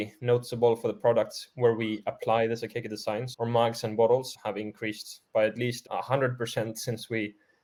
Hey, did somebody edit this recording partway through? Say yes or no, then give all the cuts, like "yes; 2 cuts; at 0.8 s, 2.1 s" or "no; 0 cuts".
no; 0 cuts